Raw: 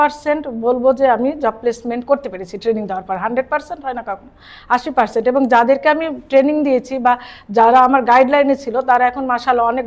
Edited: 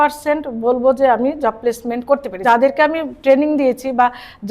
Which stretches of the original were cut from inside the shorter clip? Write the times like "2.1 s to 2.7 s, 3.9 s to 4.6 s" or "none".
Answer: 2.4 s to 5.5 s